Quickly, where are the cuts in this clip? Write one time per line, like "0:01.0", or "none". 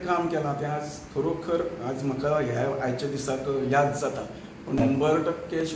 0:04.8